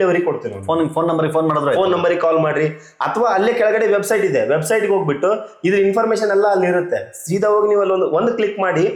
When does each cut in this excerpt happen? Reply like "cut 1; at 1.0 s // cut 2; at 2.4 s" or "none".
none